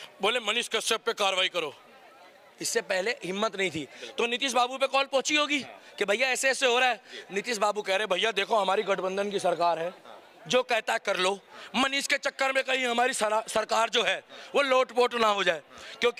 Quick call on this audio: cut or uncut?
uncut